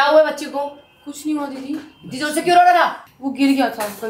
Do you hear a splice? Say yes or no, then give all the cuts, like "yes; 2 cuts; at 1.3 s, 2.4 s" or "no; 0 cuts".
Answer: no; 0 cuts